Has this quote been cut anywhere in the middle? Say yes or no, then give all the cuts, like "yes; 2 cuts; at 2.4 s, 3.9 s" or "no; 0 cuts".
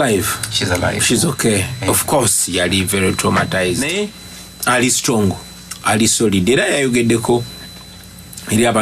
yes; 1 cut; at 3.9 s